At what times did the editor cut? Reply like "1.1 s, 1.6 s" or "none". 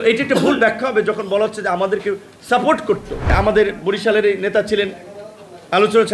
3.3 s